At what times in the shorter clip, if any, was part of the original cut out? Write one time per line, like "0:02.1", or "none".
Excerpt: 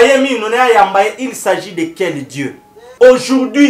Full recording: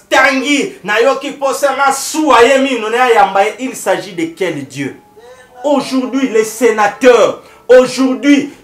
0:02.8